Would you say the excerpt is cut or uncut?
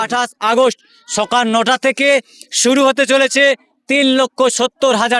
uncut